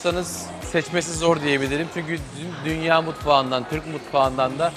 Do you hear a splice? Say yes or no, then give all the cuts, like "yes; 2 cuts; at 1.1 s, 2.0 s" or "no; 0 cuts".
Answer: no; 0 cuts